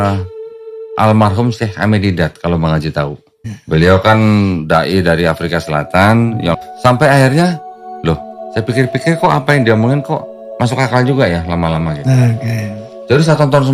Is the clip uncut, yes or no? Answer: yes